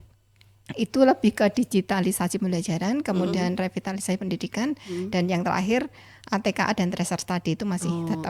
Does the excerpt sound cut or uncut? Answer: uncut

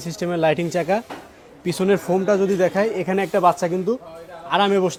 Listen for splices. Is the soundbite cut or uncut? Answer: uncut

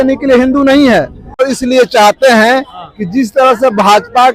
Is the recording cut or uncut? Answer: cut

